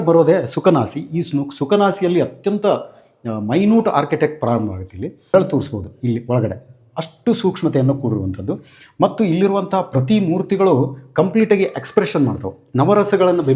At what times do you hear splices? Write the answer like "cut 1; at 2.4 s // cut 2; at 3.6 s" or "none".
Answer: cut 1; at 5.3 s